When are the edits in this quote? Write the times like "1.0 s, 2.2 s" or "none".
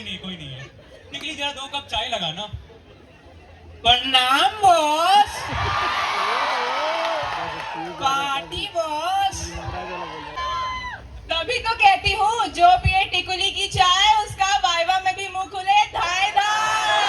10.4 s

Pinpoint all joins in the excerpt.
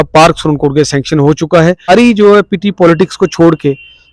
1.9 s

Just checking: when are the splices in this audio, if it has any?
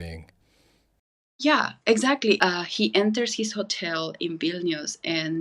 2.4 s

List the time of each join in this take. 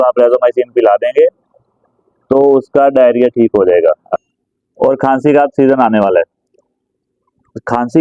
4.0 s

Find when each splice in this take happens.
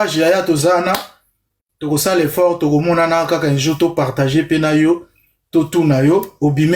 none

